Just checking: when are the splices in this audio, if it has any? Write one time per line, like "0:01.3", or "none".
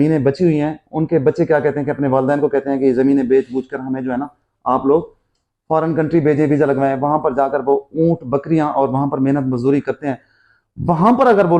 none